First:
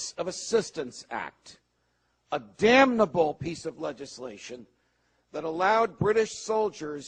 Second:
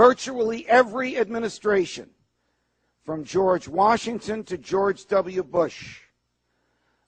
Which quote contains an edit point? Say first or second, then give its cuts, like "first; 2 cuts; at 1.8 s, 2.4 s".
second; 1 cut; at 2.5 s